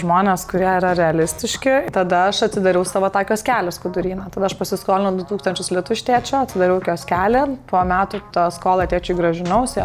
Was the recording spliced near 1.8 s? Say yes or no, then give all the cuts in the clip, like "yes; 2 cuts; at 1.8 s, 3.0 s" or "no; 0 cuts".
yes; 1 cut; at 1.8 s